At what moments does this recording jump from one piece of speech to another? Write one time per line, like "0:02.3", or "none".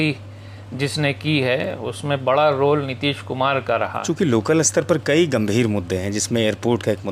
0:04.0